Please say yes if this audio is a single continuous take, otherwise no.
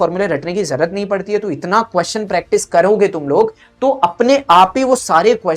yes